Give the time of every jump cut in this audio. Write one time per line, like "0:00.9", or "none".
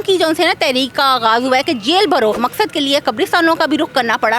0:02.4